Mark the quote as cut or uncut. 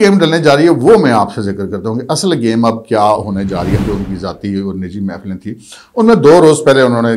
cut